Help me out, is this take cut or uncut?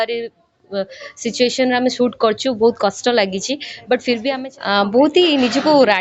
cut